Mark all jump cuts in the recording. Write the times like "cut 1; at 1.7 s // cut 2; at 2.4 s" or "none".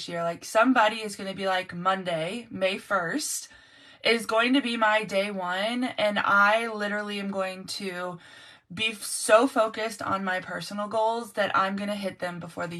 none